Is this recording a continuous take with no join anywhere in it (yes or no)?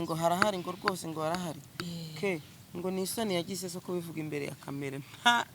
yes